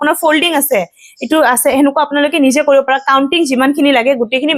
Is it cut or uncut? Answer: uncut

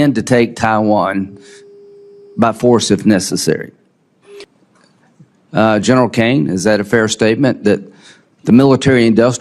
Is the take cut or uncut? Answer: cut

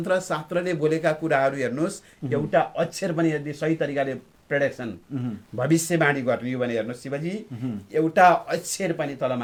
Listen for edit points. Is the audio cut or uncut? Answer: uncut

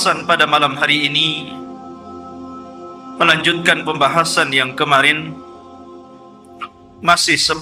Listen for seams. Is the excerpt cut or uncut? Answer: uncut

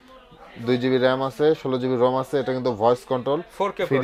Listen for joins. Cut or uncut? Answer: uncut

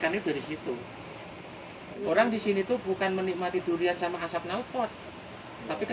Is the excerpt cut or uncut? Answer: cut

